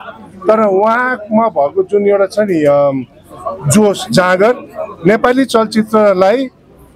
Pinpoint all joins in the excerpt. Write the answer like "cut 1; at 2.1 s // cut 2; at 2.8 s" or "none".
none